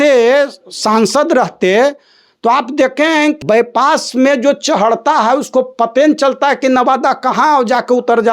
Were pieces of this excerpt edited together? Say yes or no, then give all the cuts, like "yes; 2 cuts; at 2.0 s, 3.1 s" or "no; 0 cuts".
yes; 1 cut; at 3.4 s